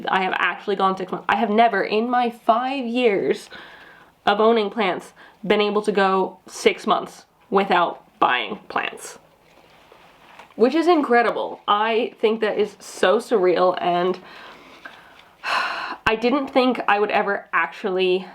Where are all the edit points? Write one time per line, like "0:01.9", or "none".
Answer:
none